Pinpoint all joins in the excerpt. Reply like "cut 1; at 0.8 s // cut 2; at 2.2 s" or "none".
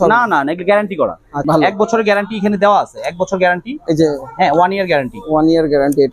cut 1; at 1.4 s